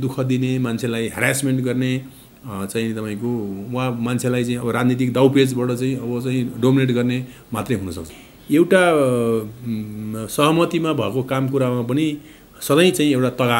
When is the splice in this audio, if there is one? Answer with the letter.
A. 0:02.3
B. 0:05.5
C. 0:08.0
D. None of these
C